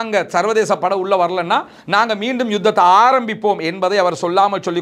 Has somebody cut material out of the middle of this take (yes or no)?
no